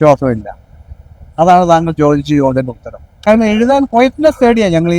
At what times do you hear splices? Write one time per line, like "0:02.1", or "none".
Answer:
0:03.1